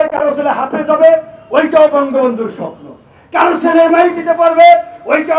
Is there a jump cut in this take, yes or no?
no